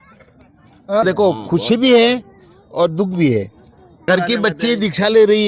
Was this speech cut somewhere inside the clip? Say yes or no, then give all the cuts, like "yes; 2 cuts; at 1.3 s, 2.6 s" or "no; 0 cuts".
yes; 2 cuts; at 1.0 s, 3.9 s